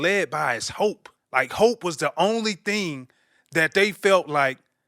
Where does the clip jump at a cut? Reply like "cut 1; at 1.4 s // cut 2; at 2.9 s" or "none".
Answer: cut 1; at 1.1 s